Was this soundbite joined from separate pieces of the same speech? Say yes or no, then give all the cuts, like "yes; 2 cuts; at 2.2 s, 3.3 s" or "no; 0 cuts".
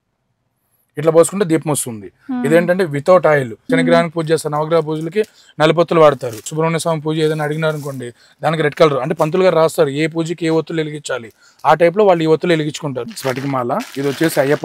yes; 3 cuts; at 3.6 s, 6.5 s, 13.0 s